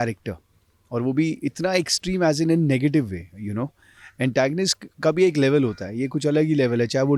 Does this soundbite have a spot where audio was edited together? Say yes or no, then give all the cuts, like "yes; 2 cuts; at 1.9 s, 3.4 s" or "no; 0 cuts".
no; 0 cuts